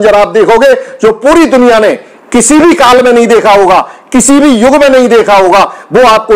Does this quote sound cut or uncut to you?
uncut